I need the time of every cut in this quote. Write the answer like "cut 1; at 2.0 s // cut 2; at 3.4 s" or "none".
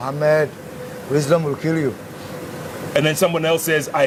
none